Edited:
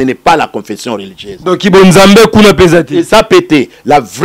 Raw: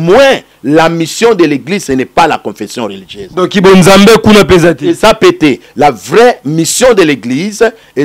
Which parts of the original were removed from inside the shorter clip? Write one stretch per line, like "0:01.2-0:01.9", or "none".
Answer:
none